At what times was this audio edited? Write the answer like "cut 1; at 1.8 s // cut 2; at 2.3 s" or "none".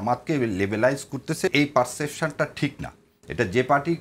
cut 1; at 1.5 s